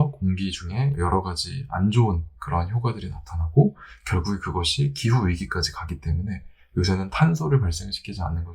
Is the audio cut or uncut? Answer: cut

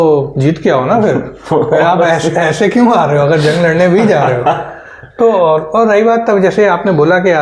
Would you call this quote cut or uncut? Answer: uncut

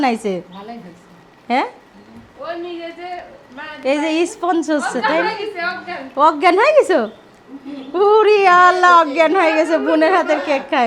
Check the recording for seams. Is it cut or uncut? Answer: uncut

